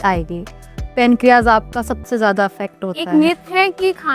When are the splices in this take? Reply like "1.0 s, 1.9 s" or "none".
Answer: 2.9 s